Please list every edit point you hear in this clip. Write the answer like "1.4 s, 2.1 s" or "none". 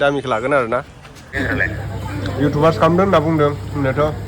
1.5 s